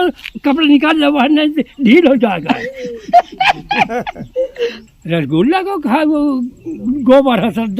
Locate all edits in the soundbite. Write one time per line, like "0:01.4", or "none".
0:04.8